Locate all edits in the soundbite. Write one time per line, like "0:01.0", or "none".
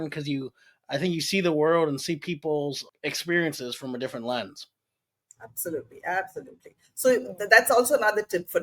0:02.9